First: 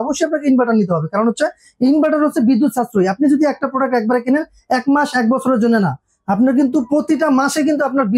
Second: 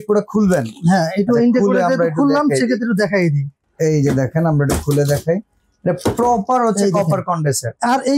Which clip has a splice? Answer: second; 1 cut; at 3.6 s

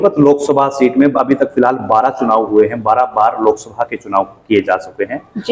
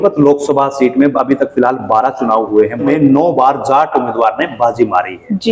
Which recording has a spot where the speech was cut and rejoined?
second; 1 cut; at 2.8 s

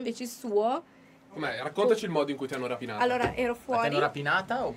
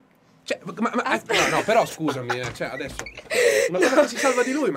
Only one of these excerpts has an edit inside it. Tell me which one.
first; 1 cut; at 1.3 s

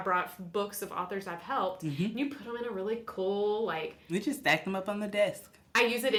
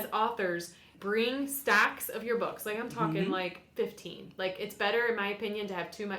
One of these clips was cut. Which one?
second; 1 cut; at 0.9 s

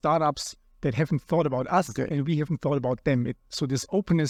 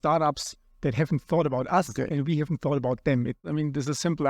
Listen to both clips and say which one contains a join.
second; 1 cut; at 3.4 s

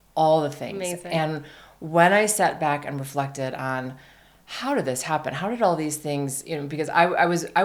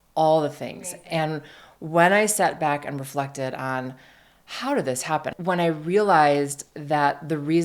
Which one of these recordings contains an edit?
second; 1 cut; at 5.3 s

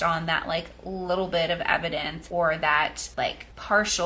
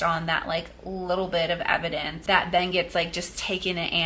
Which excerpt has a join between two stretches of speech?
second; 1 cut; at 2.1 s

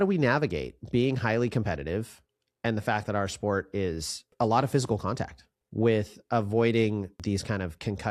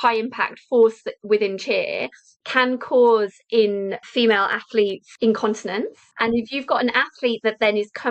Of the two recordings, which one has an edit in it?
second; 3 cuts; at 4.0 s, 5.1 s, 6.0 s

